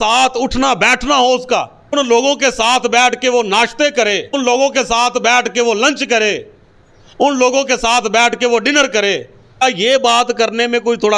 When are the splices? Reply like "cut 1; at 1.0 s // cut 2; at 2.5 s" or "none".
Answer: none